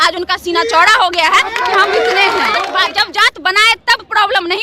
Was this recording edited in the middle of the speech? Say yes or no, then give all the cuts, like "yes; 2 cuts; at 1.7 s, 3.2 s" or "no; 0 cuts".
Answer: yes; 1 cut; at 2.7 s